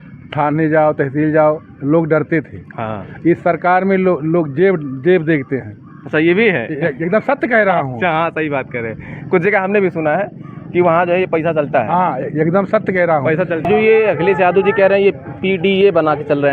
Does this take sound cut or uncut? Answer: cut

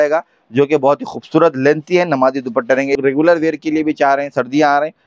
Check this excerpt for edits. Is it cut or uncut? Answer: cut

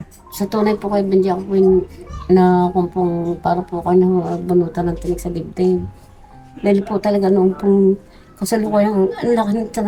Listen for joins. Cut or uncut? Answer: uncut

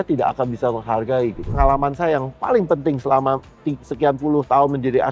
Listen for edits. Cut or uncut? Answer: cut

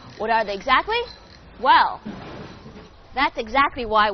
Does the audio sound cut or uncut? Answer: uncut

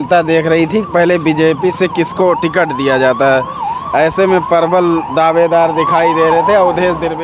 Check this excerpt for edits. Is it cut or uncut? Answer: uncut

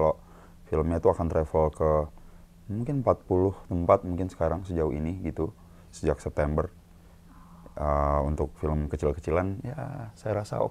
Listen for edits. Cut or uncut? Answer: uncut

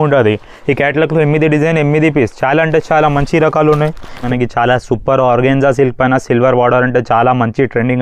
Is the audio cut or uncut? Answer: cut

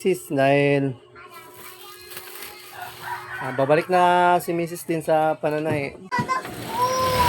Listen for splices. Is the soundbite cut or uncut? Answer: cut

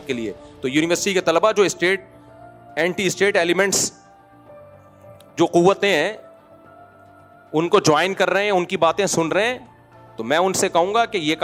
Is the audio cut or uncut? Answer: uncut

